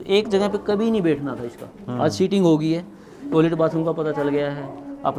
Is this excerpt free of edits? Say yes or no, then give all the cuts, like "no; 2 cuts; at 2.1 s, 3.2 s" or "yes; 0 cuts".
yes; 0 cuts